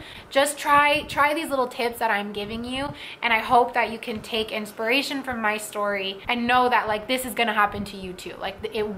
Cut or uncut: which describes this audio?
cut